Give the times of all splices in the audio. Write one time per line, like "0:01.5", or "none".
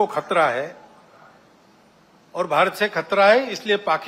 none